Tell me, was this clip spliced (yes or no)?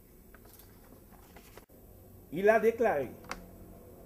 yes